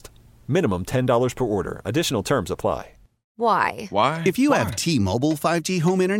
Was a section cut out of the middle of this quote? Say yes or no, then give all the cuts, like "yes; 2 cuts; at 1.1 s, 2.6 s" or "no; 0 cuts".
yes; 1 cut; at 3.2 s